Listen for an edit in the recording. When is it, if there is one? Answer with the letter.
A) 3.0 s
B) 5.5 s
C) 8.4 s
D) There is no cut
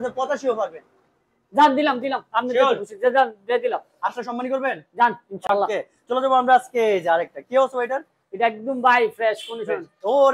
D